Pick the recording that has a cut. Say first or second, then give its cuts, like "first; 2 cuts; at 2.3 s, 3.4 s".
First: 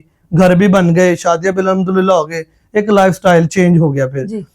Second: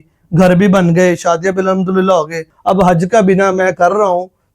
second; 1 cut; at 2.5 s